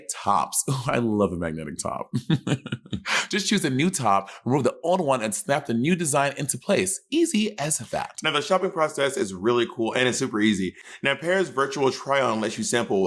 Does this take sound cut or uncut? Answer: uncut